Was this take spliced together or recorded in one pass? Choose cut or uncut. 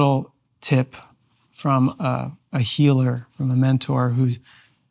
uncut